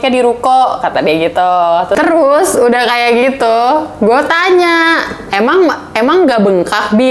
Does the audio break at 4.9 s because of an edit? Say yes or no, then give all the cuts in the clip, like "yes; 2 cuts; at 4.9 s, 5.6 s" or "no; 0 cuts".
no; 1 cut; at 2.0 s